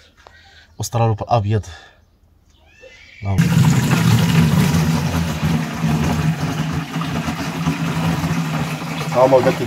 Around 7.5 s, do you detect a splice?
no; 1 cut; at 3.4 s

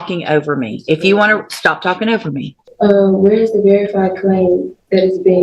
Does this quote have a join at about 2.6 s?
yes; 1 cut; at 2.6 s

